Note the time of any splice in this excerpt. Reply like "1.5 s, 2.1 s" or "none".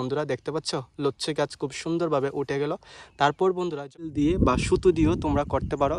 4.1 s

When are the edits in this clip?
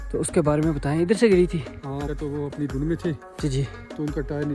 2.1 s

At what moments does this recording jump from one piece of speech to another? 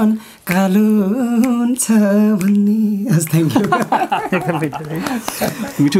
none

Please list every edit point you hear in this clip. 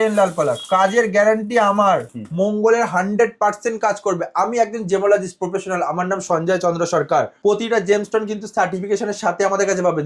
2.1 s, 7.3 s

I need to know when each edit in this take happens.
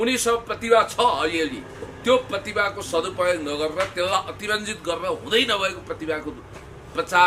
none

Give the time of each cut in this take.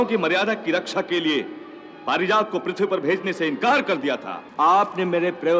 4.4 s

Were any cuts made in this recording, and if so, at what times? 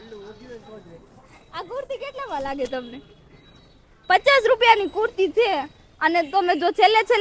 none

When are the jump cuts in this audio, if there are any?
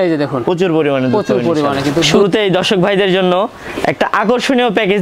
2.1 s

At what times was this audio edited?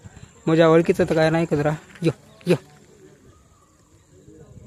none

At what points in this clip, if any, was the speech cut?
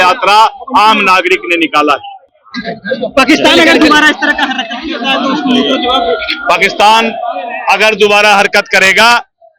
none

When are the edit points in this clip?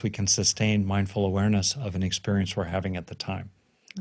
none

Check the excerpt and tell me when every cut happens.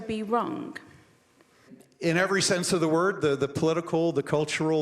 1.8 s

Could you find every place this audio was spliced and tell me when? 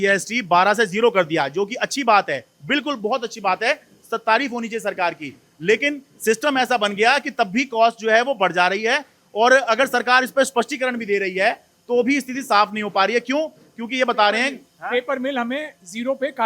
none

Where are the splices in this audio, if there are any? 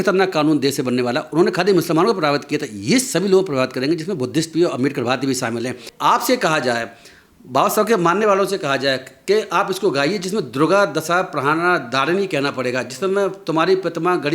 5.9 s

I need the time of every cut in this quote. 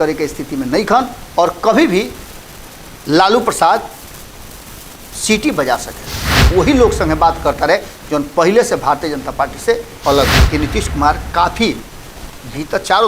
6.3 s, 10.4 s

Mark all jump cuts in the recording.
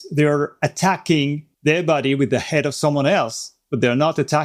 1.5 s

